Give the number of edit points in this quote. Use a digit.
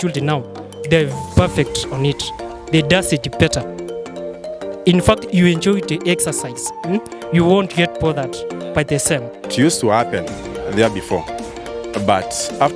1